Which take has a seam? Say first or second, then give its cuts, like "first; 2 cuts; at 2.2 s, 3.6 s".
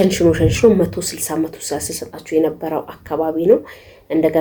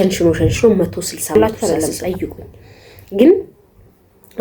second; 1 cut; at 1.3 s